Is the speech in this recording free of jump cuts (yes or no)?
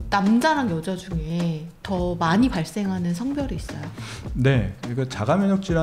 yes